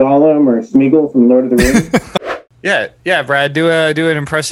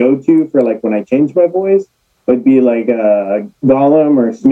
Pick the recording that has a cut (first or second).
first